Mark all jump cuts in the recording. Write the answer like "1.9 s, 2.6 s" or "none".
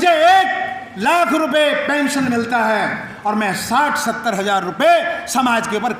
none